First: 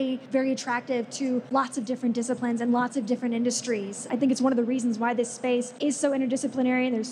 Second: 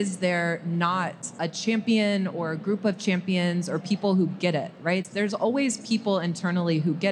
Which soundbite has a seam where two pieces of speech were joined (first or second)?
second